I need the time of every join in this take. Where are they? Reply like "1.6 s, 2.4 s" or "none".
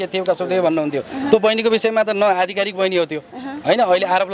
none